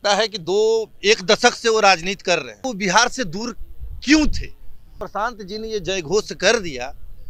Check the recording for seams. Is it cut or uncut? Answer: cut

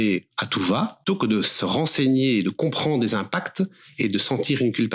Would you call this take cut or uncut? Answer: cut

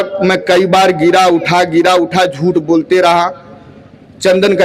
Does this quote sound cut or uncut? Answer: uncut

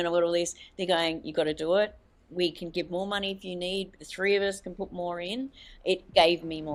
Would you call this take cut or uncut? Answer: uncut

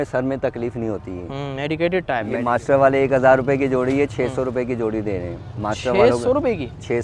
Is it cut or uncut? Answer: cut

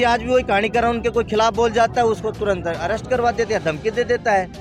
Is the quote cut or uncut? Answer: uncut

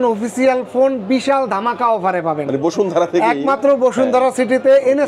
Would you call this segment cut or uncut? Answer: uncut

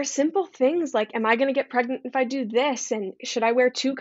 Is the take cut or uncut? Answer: uncut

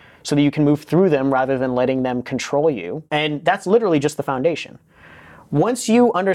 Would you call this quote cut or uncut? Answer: cut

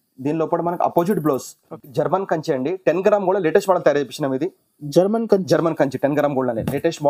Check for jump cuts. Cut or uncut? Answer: cut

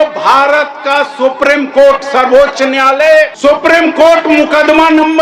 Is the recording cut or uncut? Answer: cut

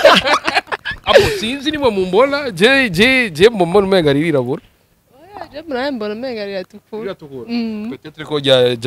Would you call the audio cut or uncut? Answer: uncut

